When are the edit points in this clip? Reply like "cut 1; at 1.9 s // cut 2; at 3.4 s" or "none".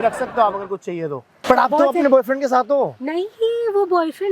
cut 1; at 1.3 s